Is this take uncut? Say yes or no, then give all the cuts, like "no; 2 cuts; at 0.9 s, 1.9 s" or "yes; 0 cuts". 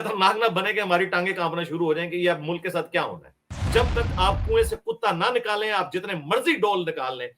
no; 1 cut; at 3.7 s